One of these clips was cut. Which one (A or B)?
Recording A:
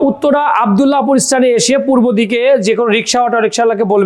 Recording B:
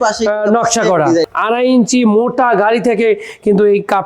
B